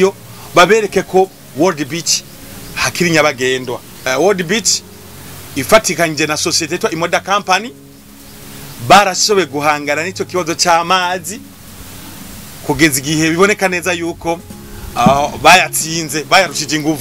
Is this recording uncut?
no; 1 cut; at 3.9 s

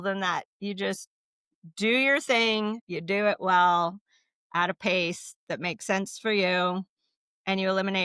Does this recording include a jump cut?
yes; 1 cut; at 2.9 s

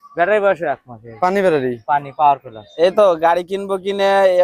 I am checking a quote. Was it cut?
yes; 1 cut; at 2.6 s

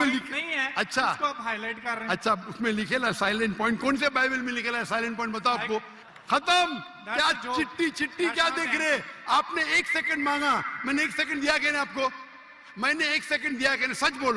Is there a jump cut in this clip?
yes; 1 cut; at 6.0 s

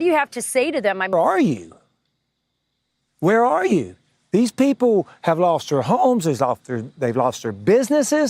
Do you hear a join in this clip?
yes; 1 cut; at 1.1 s

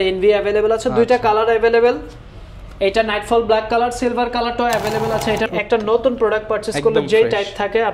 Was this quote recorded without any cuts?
no; 1 cut; at 5.5 s

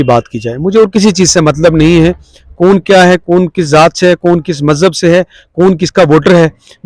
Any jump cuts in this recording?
no; 0 cuts

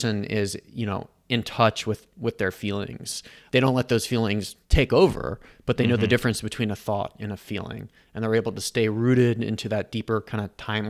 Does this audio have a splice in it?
no; 0 cuts

